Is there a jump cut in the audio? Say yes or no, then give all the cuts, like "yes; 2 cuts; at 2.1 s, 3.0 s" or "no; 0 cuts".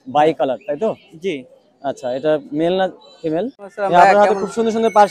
yes; 1 cut; at 3.6 s